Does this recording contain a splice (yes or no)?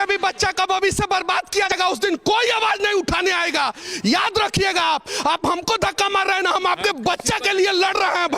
yes